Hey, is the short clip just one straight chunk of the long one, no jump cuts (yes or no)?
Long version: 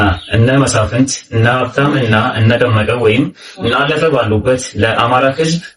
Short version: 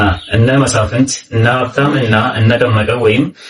yes